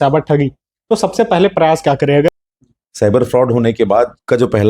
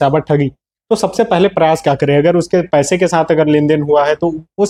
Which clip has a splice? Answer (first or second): first